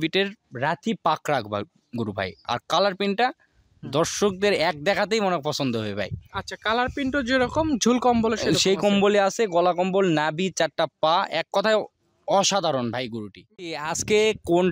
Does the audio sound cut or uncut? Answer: cut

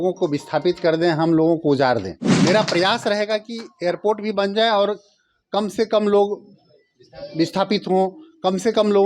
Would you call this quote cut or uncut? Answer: cut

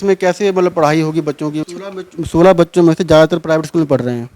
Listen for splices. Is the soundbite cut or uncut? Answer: cut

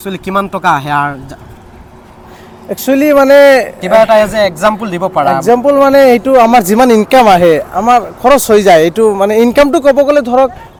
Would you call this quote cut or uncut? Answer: uncut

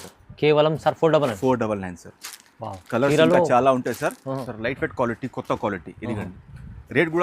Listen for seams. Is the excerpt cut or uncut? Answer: cut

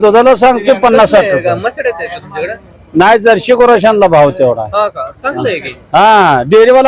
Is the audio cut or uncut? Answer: uncut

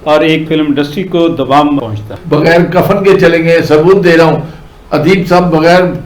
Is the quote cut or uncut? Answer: cut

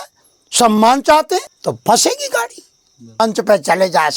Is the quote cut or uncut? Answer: cut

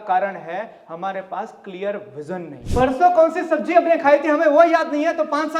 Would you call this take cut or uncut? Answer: cut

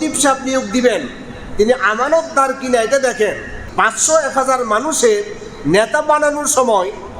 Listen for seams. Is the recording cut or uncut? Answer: cut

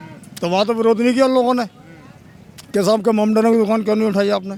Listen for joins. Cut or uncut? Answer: uncut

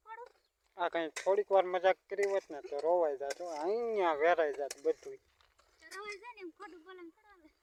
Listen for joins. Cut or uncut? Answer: uncut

